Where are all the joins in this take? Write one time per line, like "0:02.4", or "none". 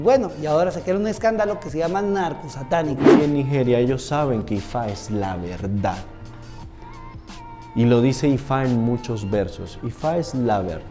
0:03.1